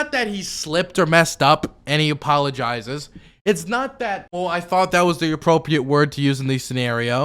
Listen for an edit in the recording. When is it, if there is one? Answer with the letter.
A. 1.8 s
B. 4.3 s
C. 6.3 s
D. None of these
B